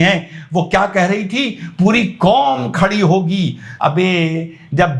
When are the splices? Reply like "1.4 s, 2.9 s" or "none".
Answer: 3.6 s